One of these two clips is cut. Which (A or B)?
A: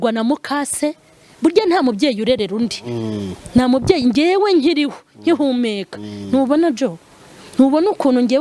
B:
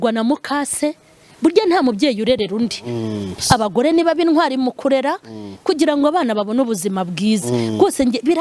B